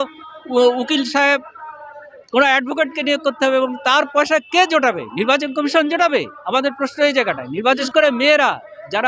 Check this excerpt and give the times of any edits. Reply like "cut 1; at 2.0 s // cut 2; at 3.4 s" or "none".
cut 1; at 7.8 s